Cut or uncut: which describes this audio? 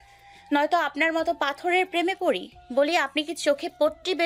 cut